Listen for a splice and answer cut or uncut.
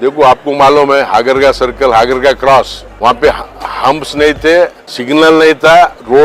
cut